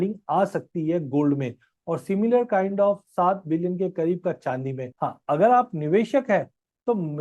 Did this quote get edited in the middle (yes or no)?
yes